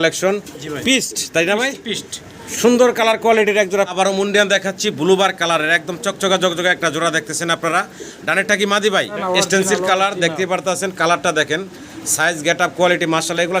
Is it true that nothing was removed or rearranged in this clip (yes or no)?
no